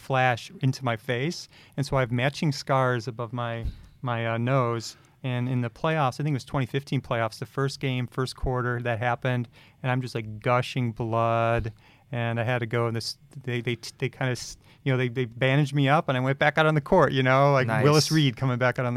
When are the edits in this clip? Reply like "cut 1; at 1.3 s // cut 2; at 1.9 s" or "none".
none